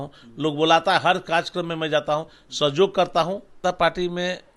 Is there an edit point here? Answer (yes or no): yes